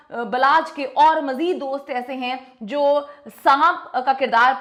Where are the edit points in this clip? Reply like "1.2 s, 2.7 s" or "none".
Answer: none